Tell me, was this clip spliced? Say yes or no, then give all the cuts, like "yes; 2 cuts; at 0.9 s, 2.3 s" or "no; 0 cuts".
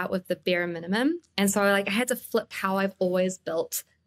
yes; 1 cut; at 2.5 s